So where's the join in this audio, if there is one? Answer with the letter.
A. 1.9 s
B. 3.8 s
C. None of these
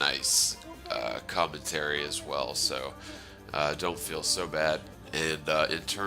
A